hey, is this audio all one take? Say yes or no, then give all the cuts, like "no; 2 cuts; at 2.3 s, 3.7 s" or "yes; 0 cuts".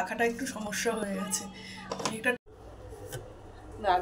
no; 1 cut; at 2.4 s